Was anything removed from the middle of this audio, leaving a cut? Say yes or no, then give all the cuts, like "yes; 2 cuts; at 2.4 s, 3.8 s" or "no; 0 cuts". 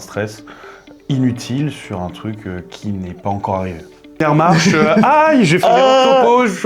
yes; 1 cut; at 4.2 s